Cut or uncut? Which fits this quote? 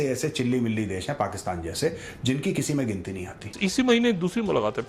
cut